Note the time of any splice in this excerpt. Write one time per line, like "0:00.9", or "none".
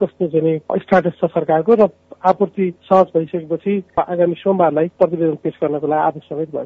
0:02.8
0:03.9
0:04.9